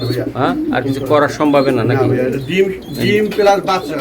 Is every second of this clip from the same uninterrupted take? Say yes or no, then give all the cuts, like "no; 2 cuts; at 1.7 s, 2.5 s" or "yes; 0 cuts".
yes; 0 cuts